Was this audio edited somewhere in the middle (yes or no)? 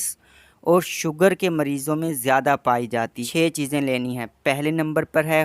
yes